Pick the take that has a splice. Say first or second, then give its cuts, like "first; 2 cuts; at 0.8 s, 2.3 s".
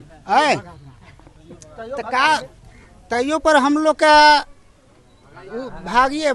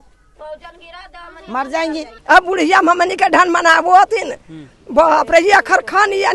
second; 1 cut; at 2.1 s